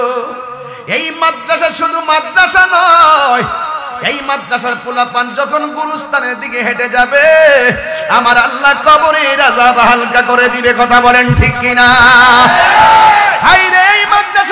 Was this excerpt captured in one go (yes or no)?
yes